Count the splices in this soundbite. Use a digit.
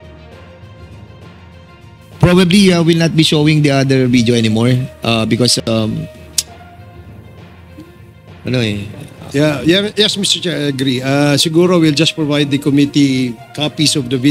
3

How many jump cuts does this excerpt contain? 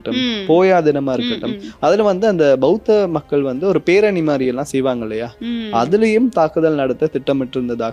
0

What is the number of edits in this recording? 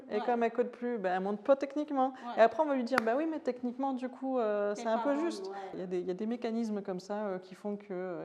1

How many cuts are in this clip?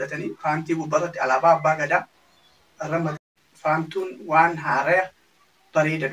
1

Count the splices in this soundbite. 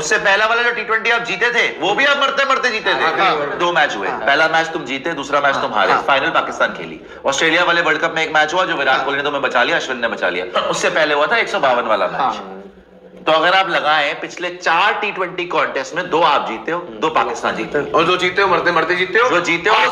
2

